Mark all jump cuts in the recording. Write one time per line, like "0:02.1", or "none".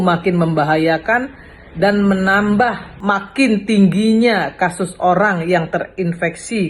0:02.9

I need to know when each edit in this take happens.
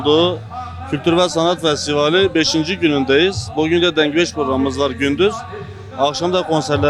none

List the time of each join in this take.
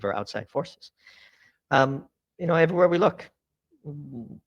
0:01.2

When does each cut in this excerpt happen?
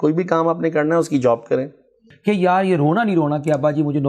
0:02.1

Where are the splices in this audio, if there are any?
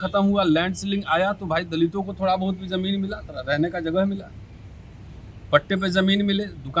none

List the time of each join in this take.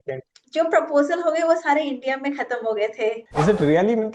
0:03.2

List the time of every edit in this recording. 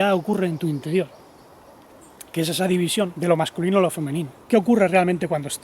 0:03.1
0:04.3

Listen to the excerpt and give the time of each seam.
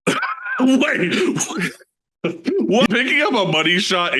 0:02.9

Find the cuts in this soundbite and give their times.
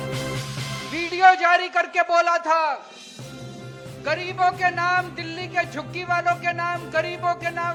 none

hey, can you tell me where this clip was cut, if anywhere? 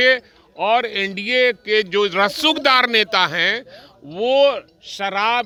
none

